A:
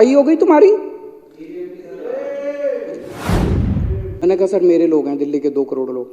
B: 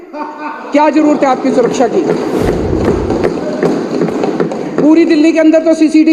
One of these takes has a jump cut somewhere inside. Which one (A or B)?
A